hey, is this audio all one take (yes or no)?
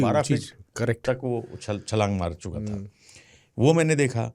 yes